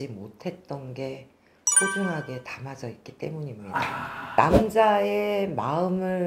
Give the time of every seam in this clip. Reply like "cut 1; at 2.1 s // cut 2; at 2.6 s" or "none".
cut 1; at 4.2 s